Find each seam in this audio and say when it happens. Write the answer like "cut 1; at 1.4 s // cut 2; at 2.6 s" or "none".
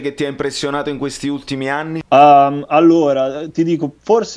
cut 1; at 2.0 s